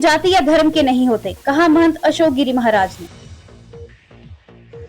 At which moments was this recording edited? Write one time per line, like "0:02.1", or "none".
0:03.1